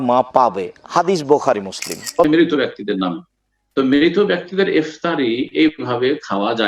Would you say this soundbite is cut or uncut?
cut